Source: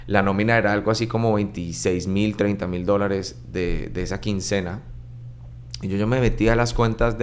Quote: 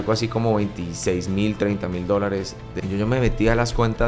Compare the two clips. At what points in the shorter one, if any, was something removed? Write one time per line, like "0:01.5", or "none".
0:02.6